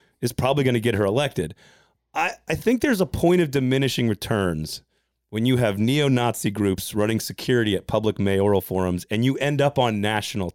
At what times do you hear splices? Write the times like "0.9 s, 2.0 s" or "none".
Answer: none